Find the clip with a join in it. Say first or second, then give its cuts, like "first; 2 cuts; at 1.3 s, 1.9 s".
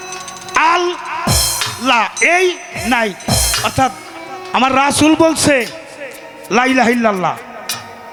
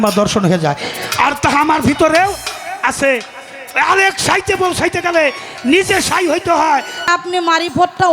second; 1 cut; at 7.1 s